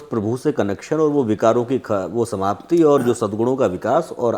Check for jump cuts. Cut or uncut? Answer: uncut